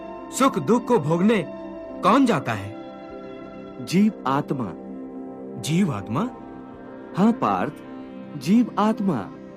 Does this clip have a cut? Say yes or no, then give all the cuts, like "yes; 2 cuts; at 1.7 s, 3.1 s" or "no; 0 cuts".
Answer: no; 0 cuts